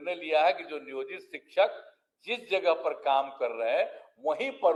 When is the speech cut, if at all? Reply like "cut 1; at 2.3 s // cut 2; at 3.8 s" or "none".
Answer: none